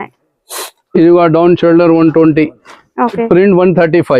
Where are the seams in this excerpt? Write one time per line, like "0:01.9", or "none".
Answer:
0:03.2